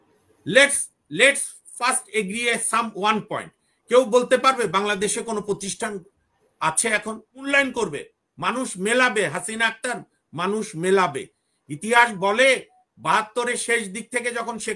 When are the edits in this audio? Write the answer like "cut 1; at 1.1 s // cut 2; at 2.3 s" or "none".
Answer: cut 1; at 7.5 s